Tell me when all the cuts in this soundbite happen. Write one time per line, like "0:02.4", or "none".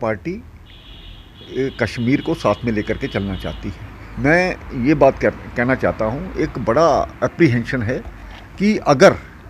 none